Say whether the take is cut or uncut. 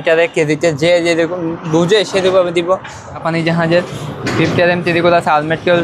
cut